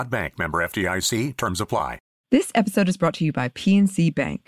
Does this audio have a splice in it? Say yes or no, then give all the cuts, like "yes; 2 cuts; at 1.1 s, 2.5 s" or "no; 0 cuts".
yes; 1 cut; at 2.1 s